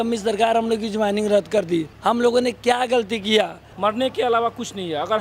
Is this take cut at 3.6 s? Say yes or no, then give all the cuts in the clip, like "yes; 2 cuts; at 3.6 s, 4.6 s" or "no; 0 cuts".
yes; 2 cuts; at 1.9 s, 3.6 s